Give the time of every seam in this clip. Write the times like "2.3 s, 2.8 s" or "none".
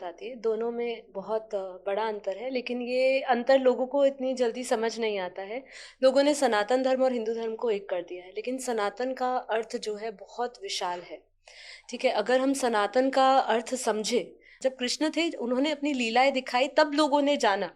14.5 s